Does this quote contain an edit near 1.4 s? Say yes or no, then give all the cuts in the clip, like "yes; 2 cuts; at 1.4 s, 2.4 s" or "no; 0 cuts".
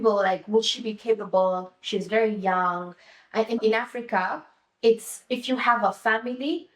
no; 1 cut; at 3.6 s